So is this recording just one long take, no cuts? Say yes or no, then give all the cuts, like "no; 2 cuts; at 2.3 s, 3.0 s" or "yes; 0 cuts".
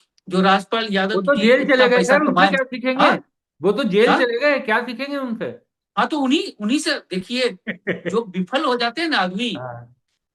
yes; 0 cuts